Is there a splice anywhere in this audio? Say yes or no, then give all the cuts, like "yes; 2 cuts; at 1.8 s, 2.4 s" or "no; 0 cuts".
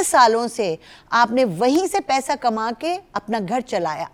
no; 0 cuts